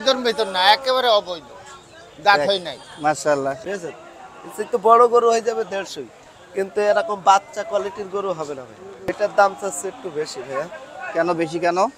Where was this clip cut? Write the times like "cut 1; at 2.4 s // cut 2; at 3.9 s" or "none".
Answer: cut 1; at 3.6 s // cut 2; at 9.1 s